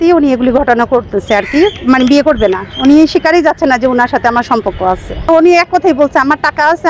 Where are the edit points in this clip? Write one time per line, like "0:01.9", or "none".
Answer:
0:05.3